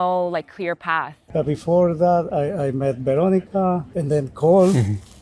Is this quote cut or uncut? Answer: cut